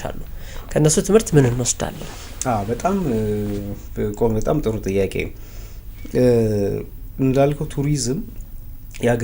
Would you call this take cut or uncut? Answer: uncut